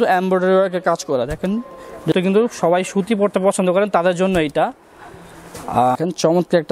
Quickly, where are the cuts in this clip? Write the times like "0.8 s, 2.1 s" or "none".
2.1 s, 6.0 s